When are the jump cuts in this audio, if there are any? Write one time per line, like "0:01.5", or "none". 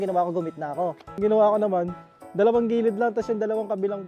0:01.1

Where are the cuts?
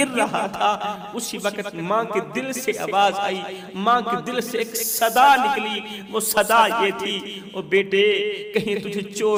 none

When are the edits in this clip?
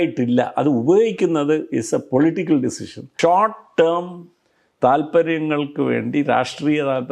0:03.0

